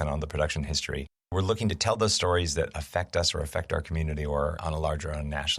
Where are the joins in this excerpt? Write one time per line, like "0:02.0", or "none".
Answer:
0:01.3